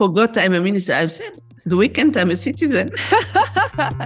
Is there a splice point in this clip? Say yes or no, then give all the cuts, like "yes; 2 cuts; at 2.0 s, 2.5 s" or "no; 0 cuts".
yes; 1 cut; at 3.0 s